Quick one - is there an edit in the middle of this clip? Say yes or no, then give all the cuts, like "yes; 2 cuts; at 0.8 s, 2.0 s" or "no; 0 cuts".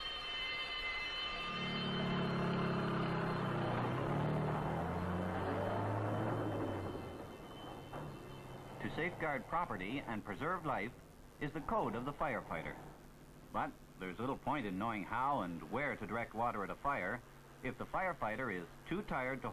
yes; 1 cut; at 12.8 s